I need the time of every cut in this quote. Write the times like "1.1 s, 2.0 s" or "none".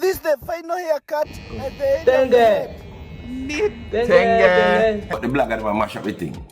5.1 s

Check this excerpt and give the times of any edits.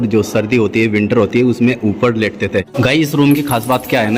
2.7 s

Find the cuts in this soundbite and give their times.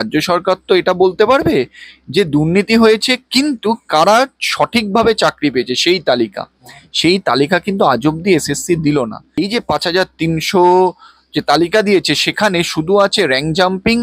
9.2 s

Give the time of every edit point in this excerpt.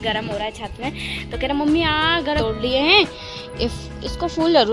2.4 s

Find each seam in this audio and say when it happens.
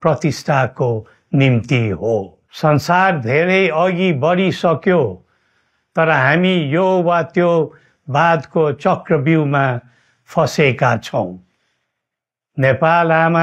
2.4 s

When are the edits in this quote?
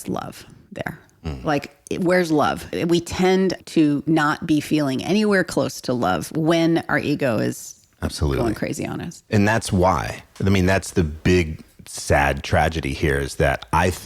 2.7 s, 3.6 s

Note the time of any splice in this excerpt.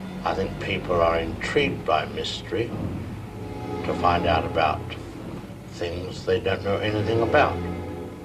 none

